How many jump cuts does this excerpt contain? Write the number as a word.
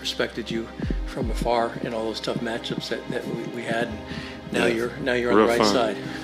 zero